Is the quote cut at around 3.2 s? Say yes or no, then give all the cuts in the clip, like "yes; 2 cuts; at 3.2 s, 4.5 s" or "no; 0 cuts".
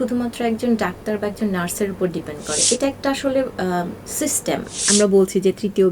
no; 1 cut; at 4.8 s